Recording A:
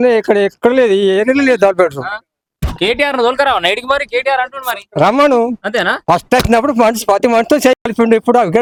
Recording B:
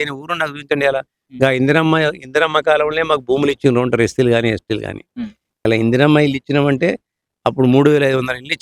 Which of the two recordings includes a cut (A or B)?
B